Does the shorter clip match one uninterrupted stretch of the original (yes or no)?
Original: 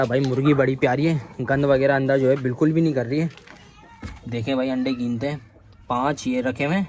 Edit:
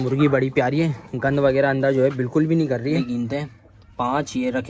no